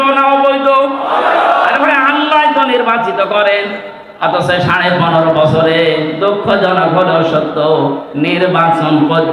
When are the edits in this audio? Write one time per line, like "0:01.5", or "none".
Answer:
none